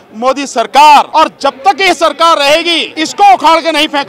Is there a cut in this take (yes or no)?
yes